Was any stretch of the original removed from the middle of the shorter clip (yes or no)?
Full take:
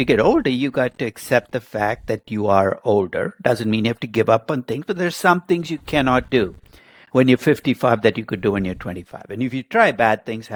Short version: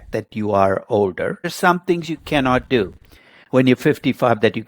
yes